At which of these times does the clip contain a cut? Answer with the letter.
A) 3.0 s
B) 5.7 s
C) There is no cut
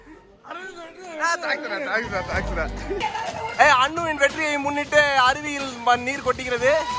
A